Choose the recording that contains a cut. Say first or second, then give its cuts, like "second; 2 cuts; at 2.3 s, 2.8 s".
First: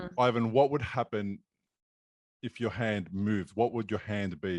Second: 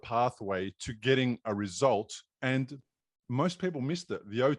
second; 1 cut; at 2.2 s